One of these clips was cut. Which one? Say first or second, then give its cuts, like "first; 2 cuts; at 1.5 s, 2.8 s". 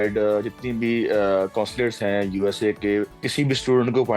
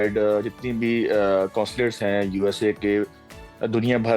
first; 1 cut; at 3.2 s